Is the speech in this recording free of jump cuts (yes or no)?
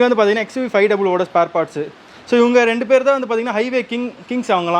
yes